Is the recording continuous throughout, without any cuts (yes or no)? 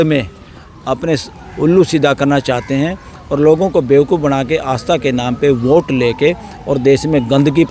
yes